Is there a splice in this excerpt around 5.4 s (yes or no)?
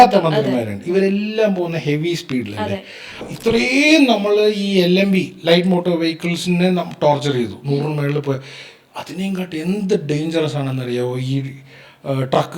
no